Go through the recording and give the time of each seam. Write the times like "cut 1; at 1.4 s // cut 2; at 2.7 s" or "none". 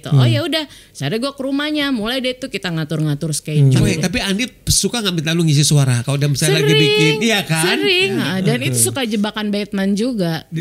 cut 1; at 3.9 s // cut 2; at 8.2 s